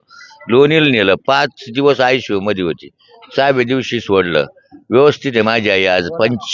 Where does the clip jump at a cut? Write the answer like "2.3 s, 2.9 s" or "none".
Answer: none